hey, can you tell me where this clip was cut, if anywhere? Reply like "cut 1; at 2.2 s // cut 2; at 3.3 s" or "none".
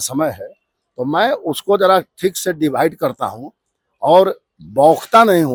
none